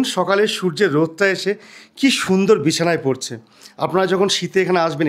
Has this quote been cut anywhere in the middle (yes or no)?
no